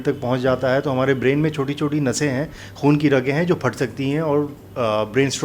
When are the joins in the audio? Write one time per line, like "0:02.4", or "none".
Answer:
none

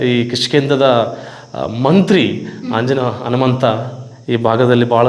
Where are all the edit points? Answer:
none

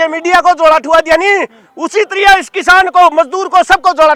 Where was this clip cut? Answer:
none

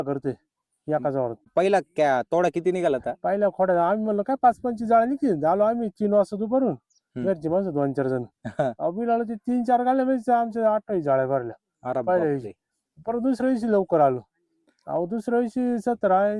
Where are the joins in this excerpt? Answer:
0:01.4

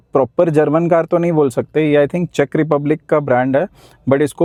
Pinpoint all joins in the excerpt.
none

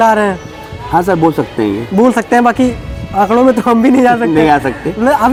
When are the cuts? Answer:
none

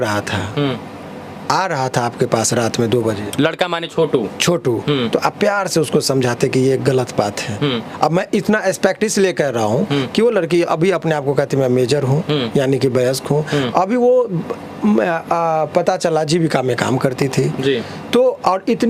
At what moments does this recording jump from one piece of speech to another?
none

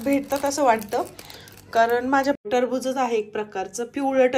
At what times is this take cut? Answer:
0:02.4

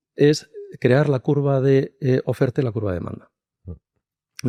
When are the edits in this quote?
none

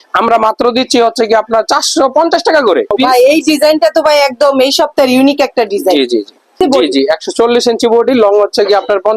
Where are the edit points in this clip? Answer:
0:02.9
0:06.6

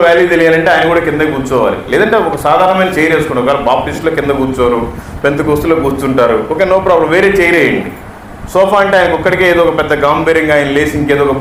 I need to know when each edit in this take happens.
none

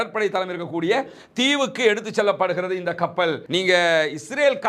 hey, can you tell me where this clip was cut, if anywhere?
0:03.4

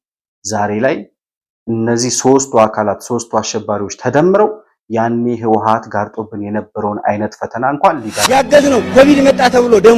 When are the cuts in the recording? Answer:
0:08.2

